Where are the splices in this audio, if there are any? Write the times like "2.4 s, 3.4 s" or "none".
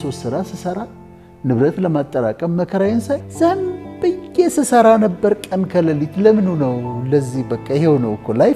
3.3 s